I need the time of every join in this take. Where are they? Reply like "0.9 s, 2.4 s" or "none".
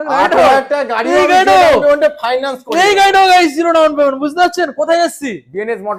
none